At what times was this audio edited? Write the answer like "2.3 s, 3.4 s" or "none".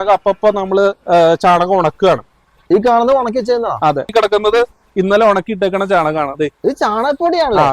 4.1 s